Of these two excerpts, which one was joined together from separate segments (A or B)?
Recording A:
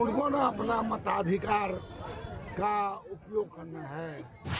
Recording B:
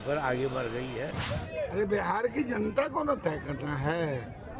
B